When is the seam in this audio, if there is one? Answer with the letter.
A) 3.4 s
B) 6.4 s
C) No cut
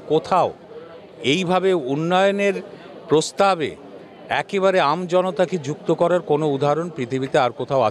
C